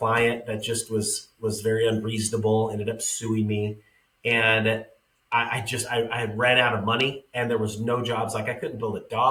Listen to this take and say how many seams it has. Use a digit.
0